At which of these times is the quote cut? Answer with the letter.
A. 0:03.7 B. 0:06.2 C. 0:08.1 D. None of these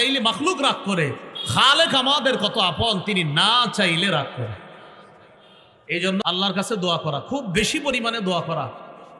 B